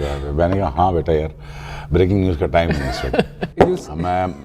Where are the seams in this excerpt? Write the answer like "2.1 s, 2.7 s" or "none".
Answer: 3.4 s